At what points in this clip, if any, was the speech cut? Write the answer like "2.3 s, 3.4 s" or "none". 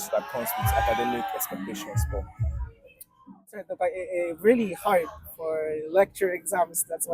3.7 s